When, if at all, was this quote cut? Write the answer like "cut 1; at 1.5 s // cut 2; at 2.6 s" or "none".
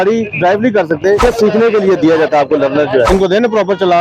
cut 1; at 1.2 s // cut 2; at 3.1 s